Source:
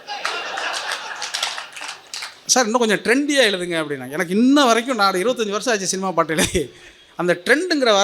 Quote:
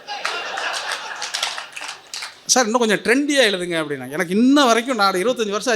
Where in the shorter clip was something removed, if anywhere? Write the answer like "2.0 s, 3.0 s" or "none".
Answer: none